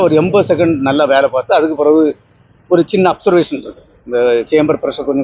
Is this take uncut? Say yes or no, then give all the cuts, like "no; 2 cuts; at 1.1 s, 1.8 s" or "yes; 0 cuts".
yes; 0 cuts